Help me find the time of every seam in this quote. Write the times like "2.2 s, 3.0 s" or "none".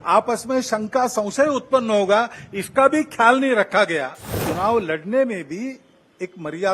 4.4 s